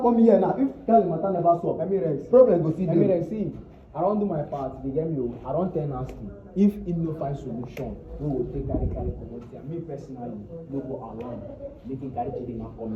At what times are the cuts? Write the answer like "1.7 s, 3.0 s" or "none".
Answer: none